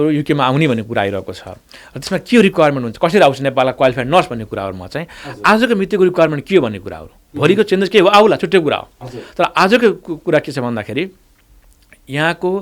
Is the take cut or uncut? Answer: uncut